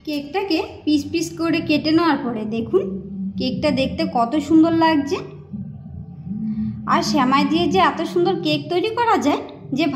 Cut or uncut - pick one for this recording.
uncut